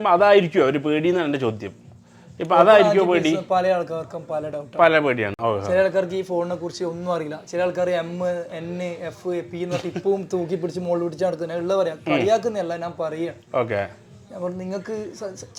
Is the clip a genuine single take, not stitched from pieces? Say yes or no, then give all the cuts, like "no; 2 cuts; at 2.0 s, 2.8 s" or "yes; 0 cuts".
yes; 0 cuts